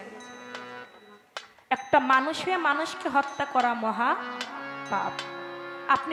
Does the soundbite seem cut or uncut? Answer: uncut